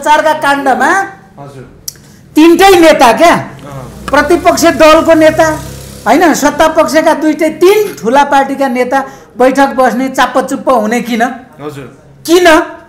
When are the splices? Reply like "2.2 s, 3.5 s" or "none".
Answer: none